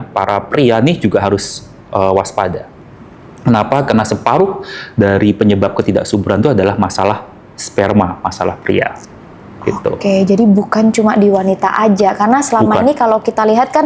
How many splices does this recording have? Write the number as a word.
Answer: zero